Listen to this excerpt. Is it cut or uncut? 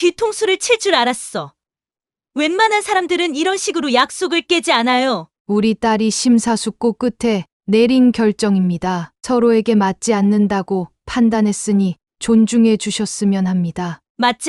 cut